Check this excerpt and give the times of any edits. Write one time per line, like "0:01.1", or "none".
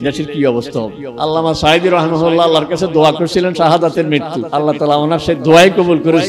0:01.1
0:04.4